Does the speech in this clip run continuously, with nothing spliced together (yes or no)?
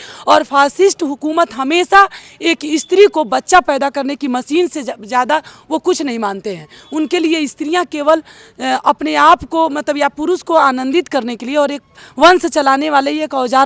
yes